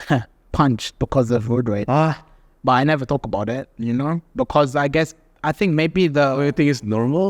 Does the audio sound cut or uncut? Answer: uncut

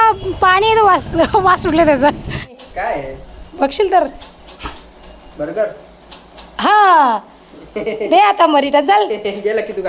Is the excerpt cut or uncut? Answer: cut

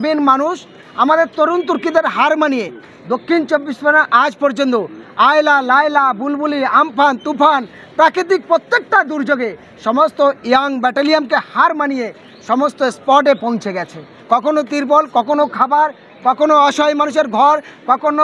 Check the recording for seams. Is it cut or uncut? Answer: uncut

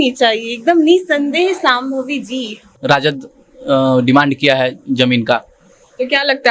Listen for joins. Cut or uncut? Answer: cut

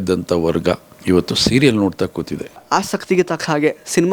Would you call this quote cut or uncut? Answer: cut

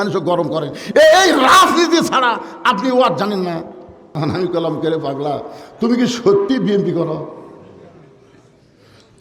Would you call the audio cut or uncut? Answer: cut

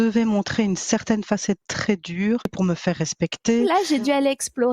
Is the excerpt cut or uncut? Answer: cut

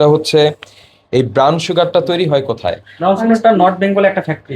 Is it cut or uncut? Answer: cut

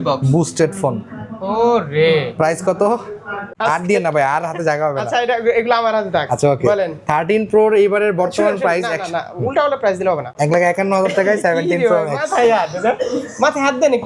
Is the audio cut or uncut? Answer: cut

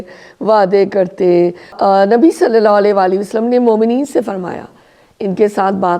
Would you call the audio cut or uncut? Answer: cut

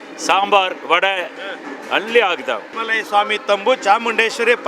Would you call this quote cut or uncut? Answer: cut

